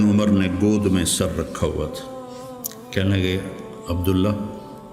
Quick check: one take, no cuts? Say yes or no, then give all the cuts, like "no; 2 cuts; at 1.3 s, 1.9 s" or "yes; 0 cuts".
yes; 0 cuts